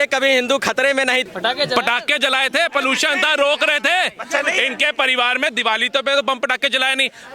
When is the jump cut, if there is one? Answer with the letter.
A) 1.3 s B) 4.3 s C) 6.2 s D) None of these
A